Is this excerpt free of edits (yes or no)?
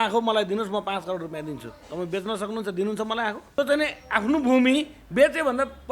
no